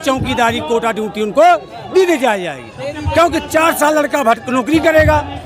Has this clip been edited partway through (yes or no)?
no